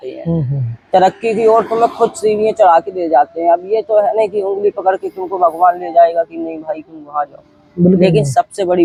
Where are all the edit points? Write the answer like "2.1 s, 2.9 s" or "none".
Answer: none